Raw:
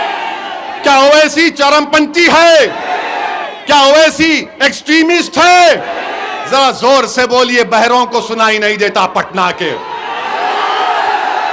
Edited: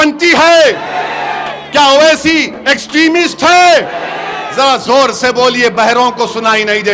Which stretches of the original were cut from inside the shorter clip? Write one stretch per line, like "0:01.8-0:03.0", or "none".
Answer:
none